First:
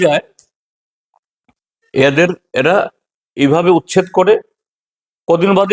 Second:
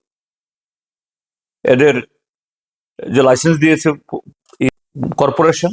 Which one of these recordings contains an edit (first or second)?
second